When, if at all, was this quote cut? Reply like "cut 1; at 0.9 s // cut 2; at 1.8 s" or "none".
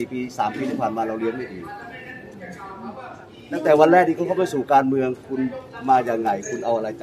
none

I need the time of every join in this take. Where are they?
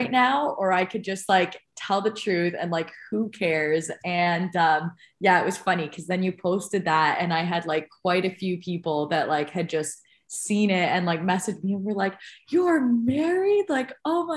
none

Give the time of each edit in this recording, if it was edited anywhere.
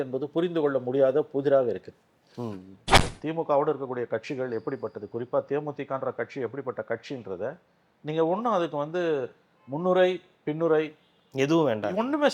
cut 1; at 3.1 s

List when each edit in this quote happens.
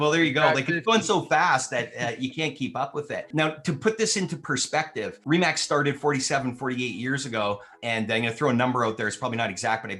cut 1; at 3.3 s // cut 2; at 5.2 s // cut 3; at 7.7 s

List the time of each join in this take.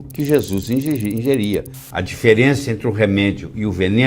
cut 1; at 1.8 s

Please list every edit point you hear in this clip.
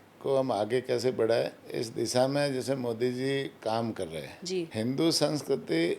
cut 1; at 1.6 s // cut 2; at 4.7 s

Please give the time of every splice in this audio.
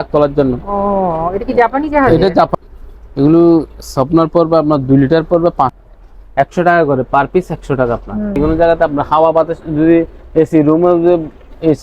cut 1; at 2.5 s // cut 2; at 5.8 s // cut 3; at 8.4 s

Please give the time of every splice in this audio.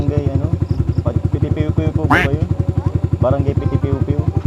none

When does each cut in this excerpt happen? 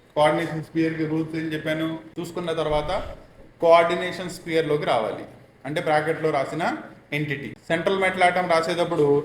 cut 1; at 2.1 s // cut 2; at 7.5 s

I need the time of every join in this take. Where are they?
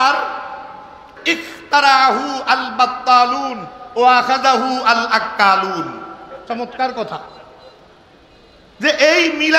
cut 1; at 1.1 s

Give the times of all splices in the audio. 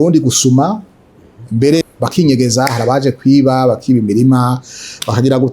cut 1; at 1.8 s

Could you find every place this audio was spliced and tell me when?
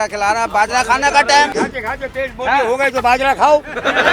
cut 1; at 1.5 s

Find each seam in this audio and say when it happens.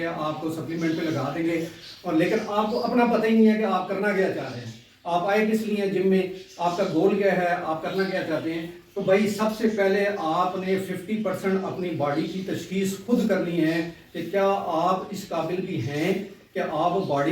none

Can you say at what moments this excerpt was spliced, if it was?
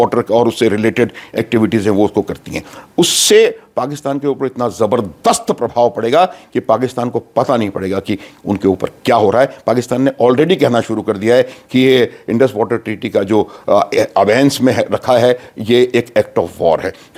none

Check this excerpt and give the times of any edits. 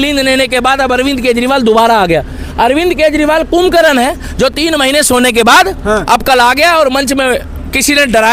none

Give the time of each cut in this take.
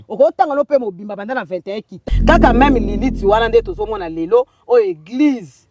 cut 1; at 1.9 s

